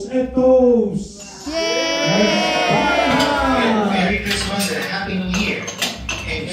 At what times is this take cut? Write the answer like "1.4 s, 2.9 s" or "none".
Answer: 4.1 s